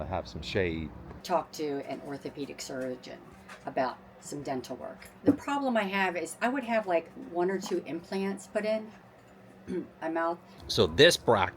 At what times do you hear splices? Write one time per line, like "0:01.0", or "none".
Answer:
0:01.1
0:10.5